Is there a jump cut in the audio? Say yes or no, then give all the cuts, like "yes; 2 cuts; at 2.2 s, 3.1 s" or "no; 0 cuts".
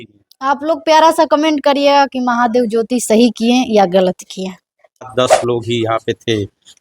yes; 1 cut; at 5.1 s